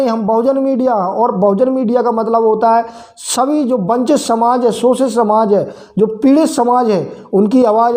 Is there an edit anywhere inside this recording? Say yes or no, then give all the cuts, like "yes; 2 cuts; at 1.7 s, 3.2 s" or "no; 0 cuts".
no; 0 cuts